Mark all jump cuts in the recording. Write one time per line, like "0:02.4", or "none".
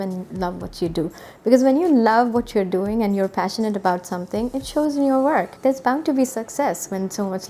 0:05.5